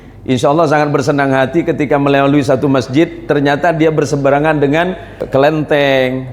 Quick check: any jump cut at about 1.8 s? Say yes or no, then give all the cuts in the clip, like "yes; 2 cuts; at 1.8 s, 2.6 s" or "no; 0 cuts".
no; 1 cut; at 5.2 s